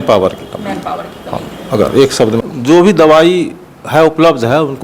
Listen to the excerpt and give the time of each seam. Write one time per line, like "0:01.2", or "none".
0:02.4